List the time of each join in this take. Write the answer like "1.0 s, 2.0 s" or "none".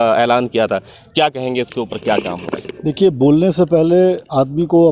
none